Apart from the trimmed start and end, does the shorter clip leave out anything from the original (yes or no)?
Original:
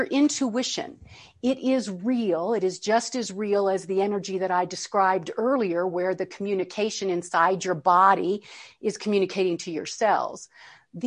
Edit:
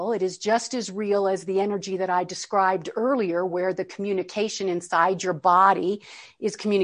no